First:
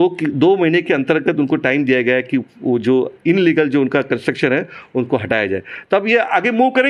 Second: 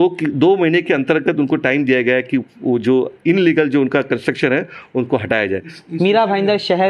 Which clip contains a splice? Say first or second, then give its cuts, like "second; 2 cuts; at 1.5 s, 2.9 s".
second; 1 cut; at 5.7 s